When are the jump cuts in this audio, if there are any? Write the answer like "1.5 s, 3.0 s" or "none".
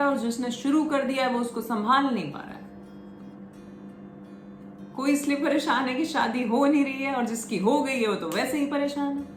none